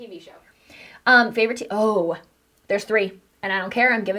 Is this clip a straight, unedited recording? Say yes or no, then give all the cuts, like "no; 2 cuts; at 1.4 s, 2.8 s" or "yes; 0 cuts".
yes; 0 cuts